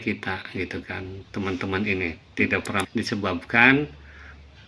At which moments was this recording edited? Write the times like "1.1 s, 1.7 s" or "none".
2.8 s